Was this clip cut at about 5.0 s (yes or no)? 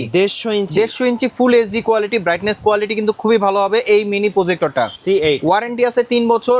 yes